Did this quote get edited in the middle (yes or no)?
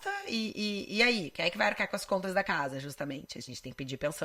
no